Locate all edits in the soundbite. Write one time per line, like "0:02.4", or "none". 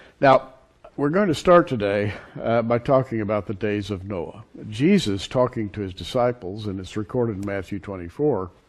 none